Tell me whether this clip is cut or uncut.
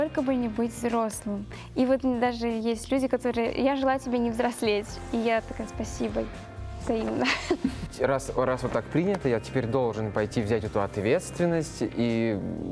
cut